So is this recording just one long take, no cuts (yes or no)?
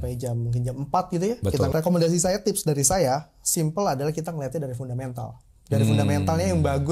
no